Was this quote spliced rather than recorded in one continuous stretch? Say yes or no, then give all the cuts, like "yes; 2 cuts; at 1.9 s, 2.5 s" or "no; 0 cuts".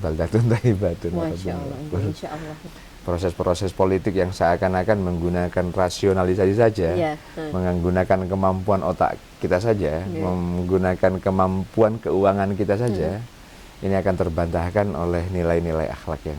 yes; 1 cut; at 2.6 s